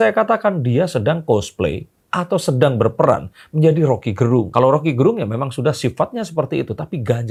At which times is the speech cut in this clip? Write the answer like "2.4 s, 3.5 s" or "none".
none